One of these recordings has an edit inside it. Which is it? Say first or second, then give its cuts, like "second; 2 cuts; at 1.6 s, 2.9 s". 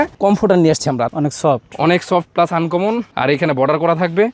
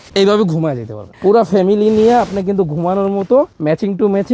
first; 1 cut; at 1.1 s